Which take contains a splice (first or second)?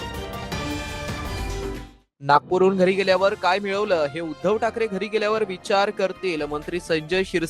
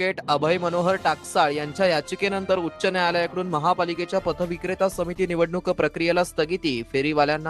first